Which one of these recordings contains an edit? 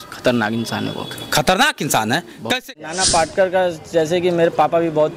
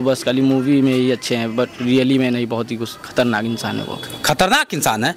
first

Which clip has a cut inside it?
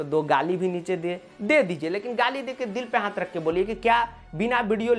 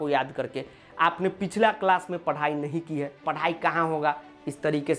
second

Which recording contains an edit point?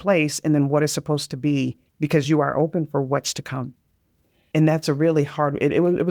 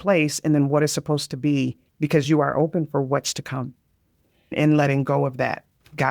second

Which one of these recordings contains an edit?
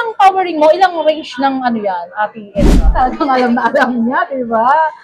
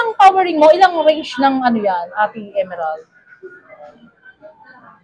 first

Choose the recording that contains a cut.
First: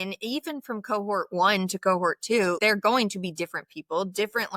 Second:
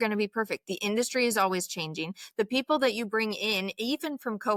first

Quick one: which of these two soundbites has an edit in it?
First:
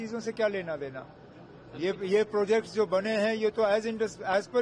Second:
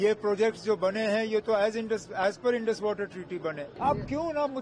second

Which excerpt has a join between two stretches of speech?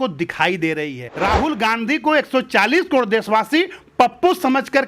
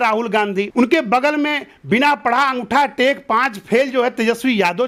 first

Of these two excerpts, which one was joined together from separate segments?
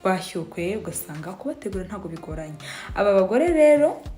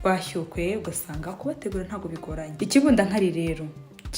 second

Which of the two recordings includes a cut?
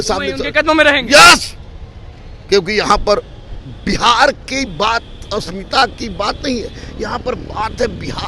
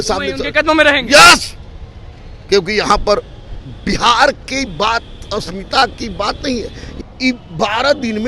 second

